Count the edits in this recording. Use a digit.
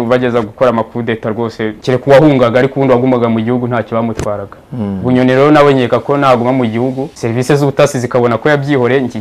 2